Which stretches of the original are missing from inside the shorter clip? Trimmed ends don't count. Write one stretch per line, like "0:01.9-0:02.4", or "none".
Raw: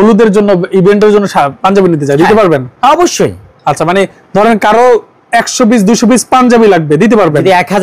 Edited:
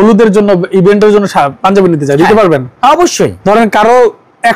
0:03.4-0:04.3